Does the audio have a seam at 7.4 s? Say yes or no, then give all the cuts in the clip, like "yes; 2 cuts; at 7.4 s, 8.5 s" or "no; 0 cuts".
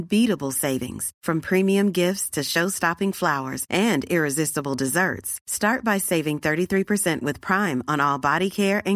no; 0 cuts